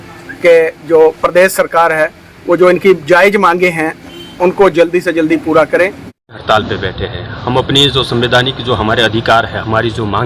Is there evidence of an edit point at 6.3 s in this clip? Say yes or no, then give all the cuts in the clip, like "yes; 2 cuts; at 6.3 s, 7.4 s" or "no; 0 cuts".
yes; 1 cut; at 6.3 s